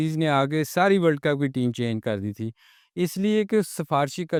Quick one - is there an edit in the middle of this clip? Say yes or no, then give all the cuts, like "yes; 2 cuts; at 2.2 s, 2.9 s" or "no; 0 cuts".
no; 0 cuts